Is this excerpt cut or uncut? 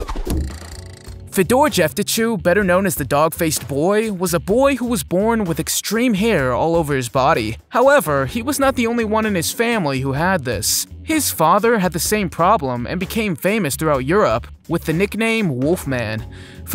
cut